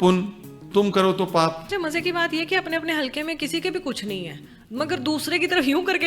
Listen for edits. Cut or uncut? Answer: cut